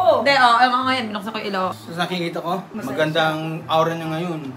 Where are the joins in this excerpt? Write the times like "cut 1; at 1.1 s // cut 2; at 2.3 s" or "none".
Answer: cut 1; at 0.9 s // cut 2; at 2.6 s